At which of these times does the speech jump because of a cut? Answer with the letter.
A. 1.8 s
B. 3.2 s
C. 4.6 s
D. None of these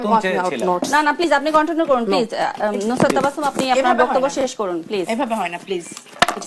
D